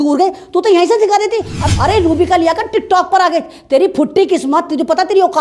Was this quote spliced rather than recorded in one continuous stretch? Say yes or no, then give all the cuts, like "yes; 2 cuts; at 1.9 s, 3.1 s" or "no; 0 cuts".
yes; 1 cut; at 1.6 s